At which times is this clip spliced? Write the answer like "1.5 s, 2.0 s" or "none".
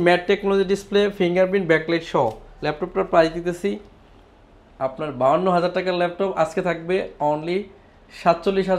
none